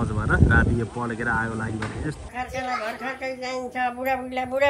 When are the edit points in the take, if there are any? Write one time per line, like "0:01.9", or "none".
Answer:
0:02.3